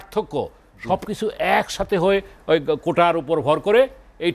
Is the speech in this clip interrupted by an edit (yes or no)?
no